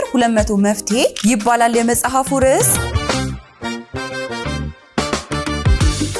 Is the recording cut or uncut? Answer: cut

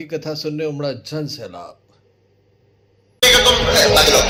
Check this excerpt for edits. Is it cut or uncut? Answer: uncut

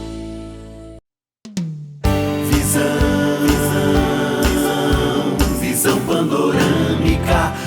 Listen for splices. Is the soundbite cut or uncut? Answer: uncut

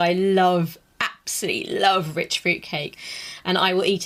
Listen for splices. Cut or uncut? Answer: uncut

